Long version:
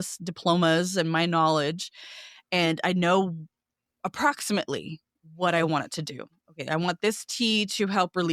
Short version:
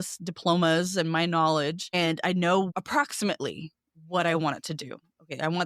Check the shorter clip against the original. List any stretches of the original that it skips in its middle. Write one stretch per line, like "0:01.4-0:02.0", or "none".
0:01.8-0:02.4
0:03.3-0:04.0

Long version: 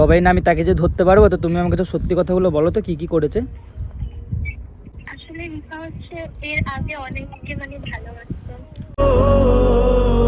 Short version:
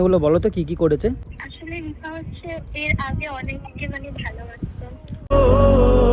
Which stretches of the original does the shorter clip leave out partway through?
0:03.7-0:05.1

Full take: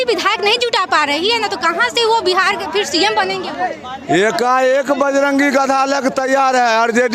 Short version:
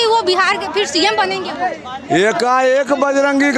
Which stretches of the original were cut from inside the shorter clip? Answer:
none

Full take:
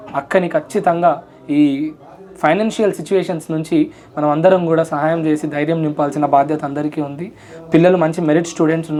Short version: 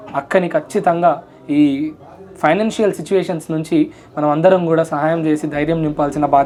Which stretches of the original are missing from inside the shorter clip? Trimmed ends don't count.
none

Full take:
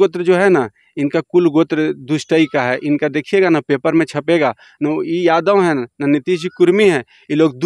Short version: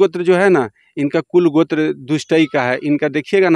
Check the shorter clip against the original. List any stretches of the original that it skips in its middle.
none

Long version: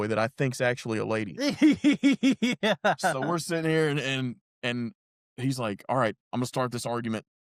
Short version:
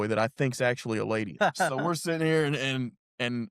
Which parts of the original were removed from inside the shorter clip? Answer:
0:01.3-0:02.8

